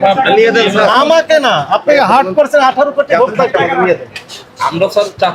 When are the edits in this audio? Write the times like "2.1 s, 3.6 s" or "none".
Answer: none